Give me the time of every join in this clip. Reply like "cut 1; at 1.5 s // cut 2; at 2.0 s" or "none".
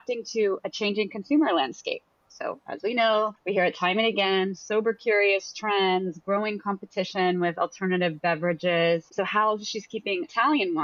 none